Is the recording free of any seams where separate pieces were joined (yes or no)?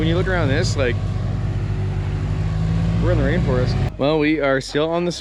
no